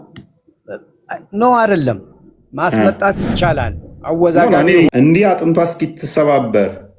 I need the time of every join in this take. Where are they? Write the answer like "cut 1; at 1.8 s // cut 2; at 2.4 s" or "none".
cut 1; at 4.9 s